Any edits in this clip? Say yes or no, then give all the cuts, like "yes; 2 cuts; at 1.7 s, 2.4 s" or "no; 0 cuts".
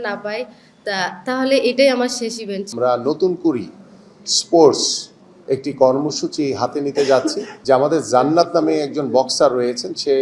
yes; 2 cuts; at 2.7 s, 7.5 s